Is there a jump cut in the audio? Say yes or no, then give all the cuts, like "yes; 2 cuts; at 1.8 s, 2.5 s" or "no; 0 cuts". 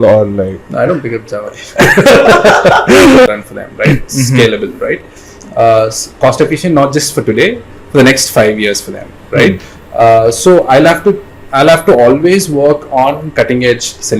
yes; 1 cut; at 3.3 s